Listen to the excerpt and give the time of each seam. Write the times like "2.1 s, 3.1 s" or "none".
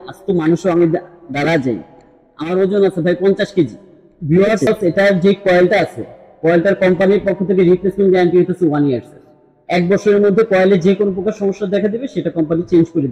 4.7 s